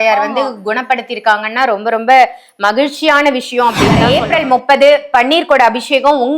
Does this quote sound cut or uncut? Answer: cut